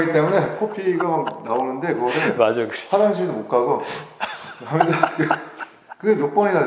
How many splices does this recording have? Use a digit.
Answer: 0